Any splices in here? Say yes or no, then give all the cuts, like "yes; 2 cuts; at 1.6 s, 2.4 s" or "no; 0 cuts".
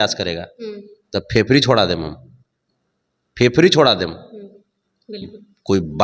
no; 0 cuts